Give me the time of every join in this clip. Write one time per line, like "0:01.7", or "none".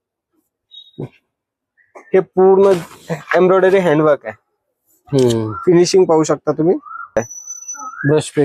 0:07.3